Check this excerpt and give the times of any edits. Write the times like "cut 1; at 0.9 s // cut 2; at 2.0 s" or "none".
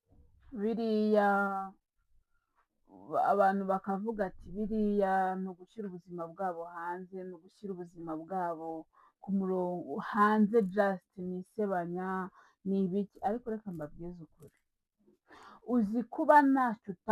none

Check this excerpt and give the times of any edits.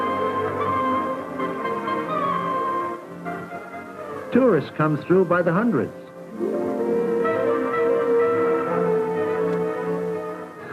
cut 1; at 7.1 s

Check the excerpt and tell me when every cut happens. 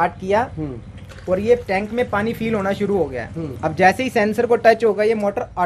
none

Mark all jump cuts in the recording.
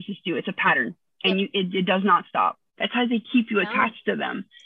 cut 1; at 2.7 s

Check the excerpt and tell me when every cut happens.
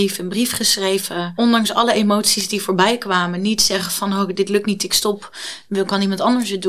cut 1; at 1.3 s

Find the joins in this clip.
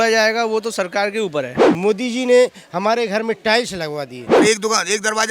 cut 1; at 1.6 s // cut 2; at 4.2 s

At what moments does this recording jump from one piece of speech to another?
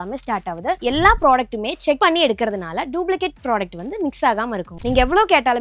cut 1; at 0.8 s // cut 2; at 2.0 s // cut 3; at 4.8 s

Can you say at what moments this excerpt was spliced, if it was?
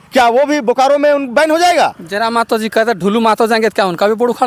none

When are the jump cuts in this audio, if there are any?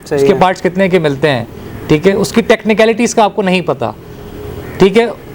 none

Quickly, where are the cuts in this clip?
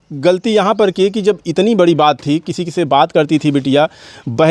none

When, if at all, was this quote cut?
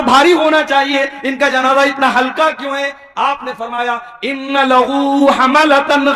none

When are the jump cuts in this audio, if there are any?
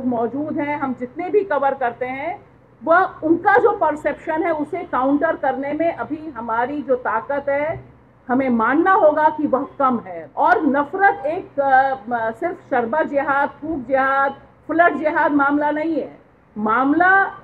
cut 1; at 10.2 s

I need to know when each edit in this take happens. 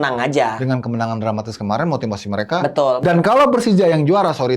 cut 1; at 3.0 s

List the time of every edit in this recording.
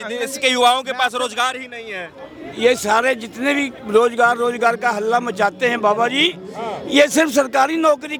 none

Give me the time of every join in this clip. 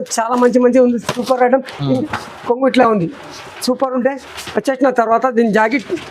cut 1; at 2.0 s

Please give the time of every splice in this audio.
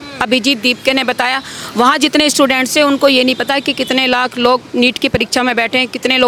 none

